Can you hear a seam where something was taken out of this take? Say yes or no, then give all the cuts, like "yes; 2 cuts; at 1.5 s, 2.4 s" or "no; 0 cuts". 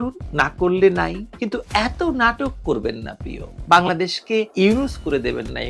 no; 0 cuts